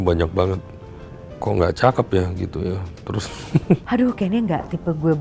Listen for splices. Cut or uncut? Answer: cut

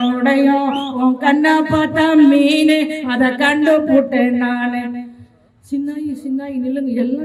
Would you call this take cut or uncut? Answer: uncut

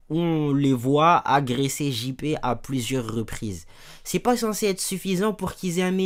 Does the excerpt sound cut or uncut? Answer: uncut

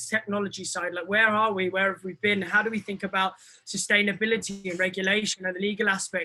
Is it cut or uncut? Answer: uncut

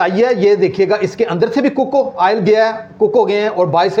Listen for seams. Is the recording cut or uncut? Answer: uncut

